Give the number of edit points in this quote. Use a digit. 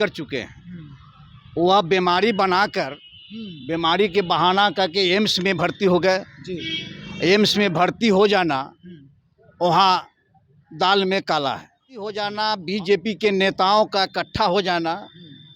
1